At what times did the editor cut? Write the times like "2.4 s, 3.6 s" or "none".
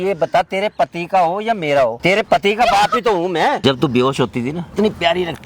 2.0 s, 3.6 s, 4.6 s